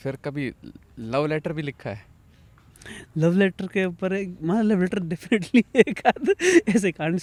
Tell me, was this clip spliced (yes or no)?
no